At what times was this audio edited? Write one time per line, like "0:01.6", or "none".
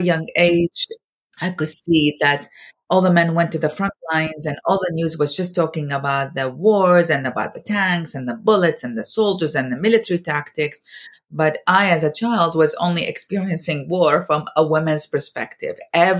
0:00.9